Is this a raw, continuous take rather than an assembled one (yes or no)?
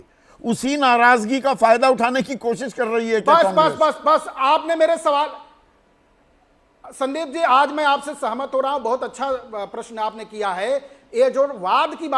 yes